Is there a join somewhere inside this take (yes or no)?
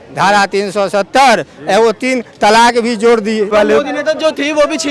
yes